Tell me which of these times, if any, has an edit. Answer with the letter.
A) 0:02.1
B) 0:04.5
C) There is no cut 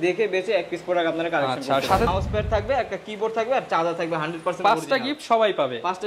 A